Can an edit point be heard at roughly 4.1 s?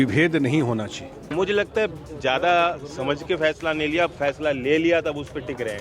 no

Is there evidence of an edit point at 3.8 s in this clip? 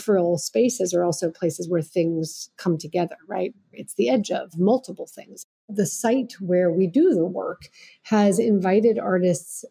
no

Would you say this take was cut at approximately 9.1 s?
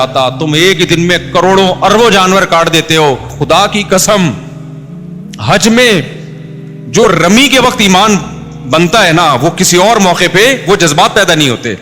no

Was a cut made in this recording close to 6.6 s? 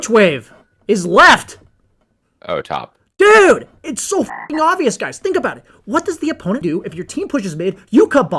yes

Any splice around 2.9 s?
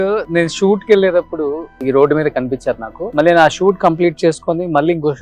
yes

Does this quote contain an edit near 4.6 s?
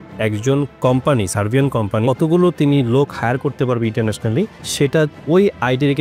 yes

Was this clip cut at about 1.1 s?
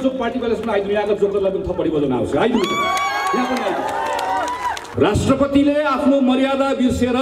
no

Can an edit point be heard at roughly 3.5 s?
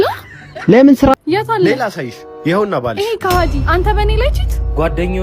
no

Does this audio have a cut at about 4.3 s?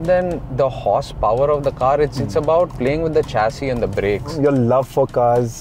yes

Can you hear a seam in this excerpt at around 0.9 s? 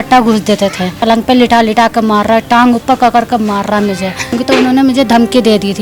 yes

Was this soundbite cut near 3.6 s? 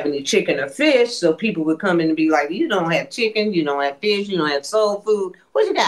no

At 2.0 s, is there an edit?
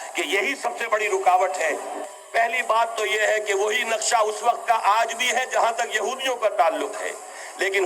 yes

